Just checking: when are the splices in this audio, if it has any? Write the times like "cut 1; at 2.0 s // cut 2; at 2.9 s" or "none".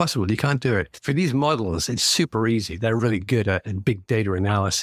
none